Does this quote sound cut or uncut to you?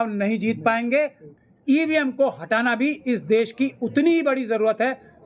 cut